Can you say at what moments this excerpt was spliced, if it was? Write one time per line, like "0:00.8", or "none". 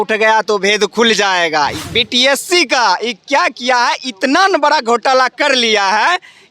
0:01.8